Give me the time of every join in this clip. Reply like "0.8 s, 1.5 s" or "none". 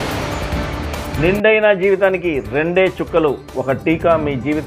1.1 s